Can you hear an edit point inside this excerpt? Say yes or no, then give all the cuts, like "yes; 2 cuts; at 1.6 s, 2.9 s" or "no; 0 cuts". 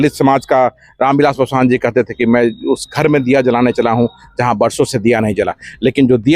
no; 0 cuts